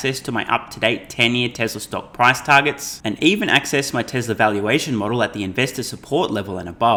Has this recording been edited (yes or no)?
no